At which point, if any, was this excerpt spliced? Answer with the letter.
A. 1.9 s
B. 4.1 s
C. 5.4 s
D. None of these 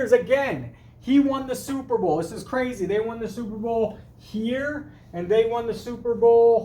D